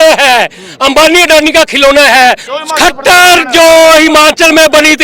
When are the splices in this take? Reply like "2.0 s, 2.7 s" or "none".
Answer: 2.5 s

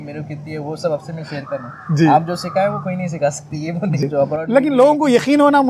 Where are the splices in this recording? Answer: 4.0 s

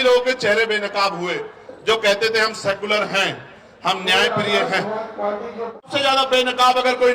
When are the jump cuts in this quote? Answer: 5.9 s

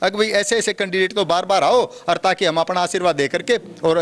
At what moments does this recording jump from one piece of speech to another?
none

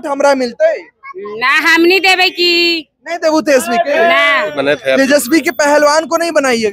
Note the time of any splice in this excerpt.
4.5 s

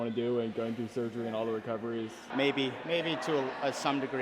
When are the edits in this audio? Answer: 2.2 s

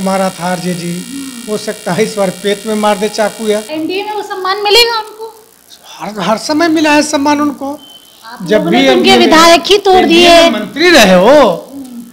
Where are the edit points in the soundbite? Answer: 3.7 s

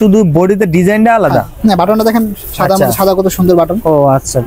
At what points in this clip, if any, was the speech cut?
none

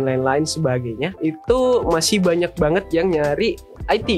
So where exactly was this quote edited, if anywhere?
1.1 s

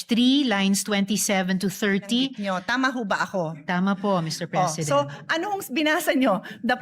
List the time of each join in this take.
2.4 s

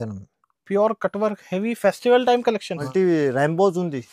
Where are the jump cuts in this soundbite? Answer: 2.8 s

